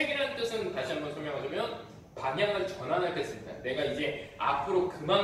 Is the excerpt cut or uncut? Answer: cut